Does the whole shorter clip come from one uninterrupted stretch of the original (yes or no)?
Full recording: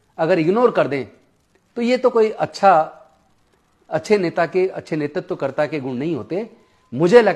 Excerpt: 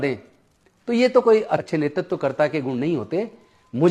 no